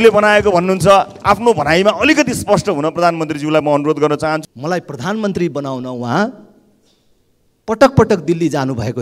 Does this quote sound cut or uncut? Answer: cut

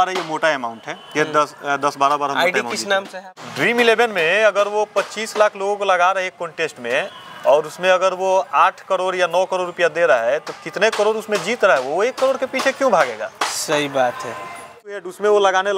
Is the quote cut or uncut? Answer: cut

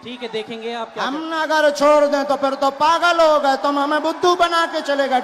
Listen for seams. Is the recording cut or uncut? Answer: uncut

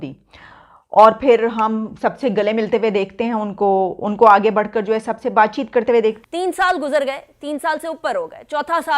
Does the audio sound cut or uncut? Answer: cut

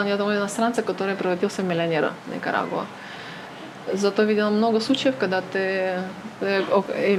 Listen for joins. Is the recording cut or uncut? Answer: uncut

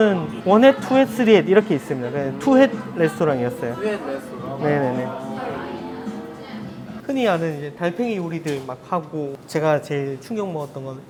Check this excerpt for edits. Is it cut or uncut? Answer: uncut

